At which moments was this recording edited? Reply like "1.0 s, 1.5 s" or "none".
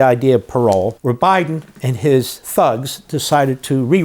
1.0 s